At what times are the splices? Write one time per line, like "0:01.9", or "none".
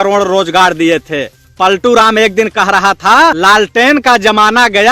0:01.4
0:03.4